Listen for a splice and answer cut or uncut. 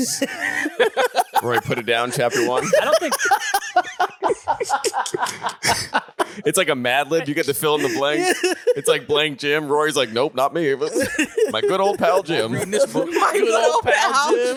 uncut